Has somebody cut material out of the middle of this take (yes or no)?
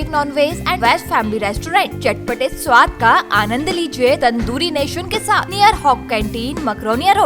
yes